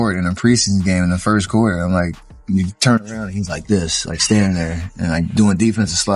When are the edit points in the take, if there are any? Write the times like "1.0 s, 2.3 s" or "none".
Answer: none